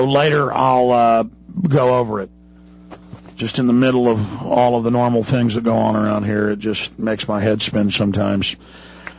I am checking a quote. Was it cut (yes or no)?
no